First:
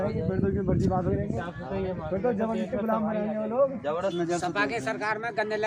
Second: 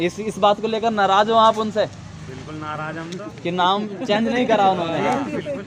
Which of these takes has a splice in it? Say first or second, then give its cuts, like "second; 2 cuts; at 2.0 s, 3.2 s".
first; 1 cut; at 4.1 s